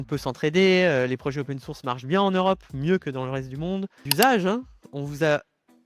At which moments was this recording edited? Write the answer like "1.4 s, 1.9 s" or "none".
4.0 s

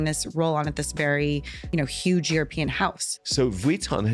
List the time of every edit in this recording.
3.1 s

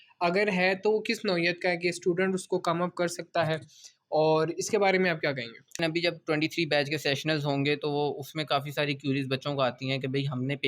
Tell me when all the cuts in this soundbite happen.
5.8 s

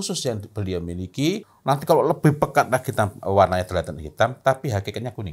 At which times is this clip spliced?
1.5 s

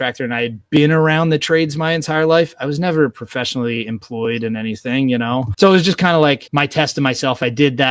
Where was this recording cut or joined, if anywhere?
6.4 s

